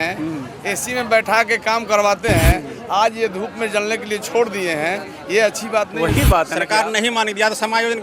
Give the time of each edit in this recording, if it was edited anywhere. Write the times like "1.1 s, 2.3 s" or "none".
6.6 s